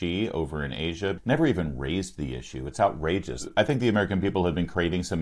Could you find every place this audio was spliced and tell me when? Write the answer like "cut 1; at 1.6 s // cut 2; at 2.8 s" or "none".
cut 1; at 1.2 s // cut 2; at 3.5 s